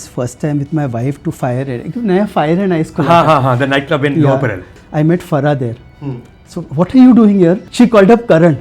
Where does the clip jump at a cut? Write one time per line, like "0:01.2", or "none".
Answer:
0:04.8
0:07.6